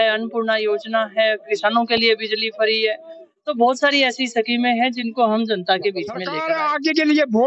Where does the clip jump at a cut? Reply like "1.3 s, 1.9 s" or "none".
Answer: 6.3 s

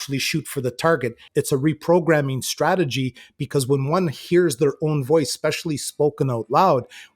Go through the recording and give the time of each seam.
1.2 s

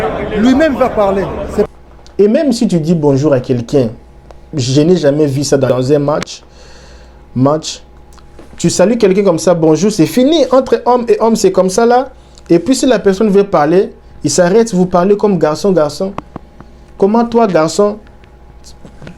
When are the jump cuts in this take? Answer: 1.7 s, 5.7 s

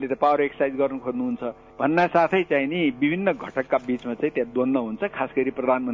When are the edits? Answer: none

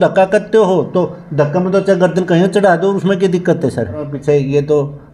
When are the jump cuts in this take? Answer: 4.1 s

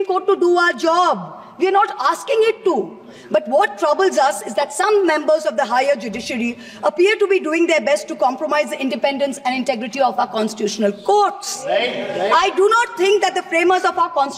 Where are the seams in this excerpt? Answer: none

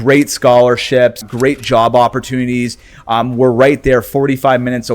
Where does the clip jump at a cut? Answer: 1.2 s

